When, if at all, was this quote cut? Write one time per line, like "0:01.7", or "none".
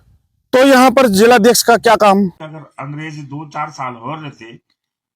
0:02.4